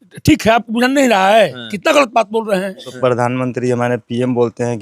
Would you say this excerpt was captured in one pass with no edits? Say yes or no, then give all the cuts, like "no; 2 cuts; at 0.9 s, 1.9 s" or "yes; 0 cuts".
no; 1 cut; at 2.9 s